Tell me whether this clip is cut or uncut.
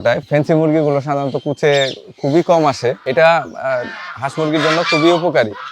cut